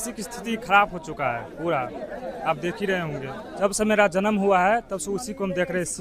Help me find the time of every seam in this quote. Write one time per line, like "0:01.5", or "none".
0:03.5